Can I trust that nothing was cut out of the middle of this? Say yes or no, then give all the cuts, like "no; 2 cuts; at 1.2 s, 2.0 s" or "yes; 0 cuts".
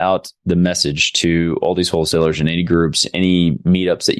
yes; 0 cuts